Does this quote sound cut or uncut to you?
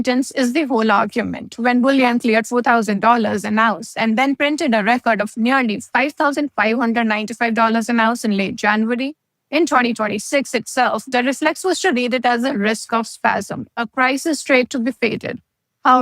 cut